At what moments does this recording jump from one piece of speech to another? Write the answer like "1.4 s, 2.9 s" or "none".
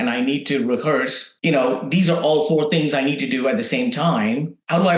1.3 s